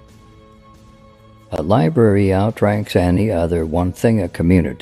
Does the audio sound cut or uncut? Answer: cut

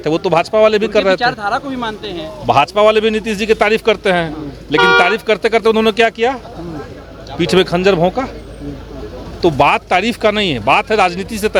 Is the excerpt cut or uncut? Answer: uncut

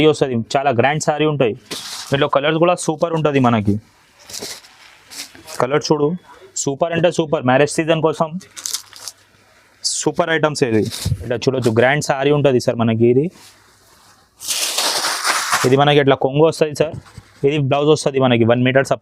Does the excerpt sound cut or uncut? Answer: cut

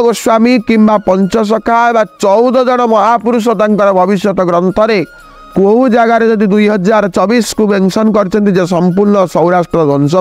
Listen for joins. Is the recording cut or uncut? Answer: uncut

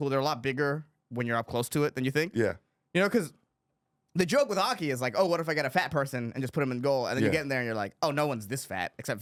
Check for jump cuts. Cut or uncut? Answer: uncut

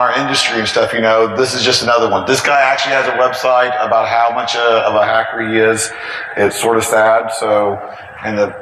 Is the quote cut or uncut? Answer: cut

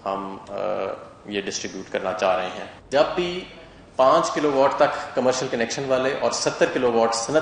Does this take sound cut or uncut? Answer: cut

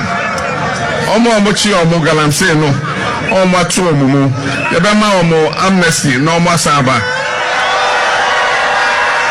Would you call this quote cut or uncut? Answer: uncut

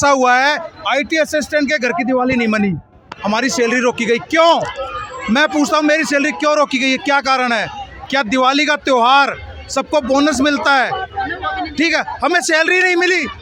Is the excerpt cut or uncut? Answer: uncut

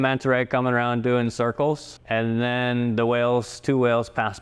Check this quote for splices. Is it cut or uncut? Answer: cut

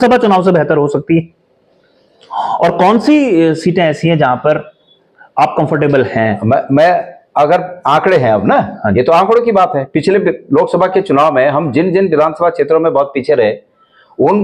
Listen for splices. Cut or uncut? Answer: uncut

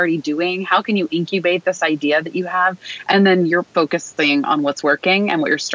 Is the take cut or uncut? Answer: cut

